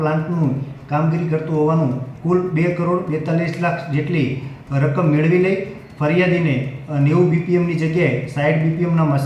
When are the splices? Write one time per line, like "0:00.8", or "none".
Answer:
0:02.1